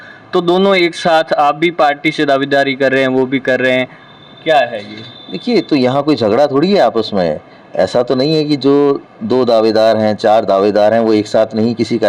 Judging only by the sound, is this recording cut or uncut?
uncut